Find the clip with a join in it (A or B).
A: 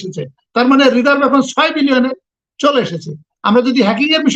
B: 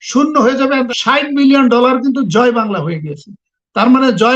B